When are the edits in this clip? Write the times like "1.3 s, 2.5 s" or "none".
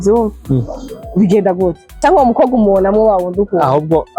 1.9 s